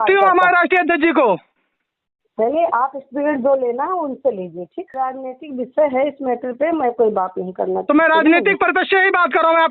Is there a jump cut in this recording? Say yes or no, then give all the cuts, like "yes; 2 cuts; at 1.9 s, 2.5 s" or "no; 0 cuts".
yes; 1 cut; at 4.9 s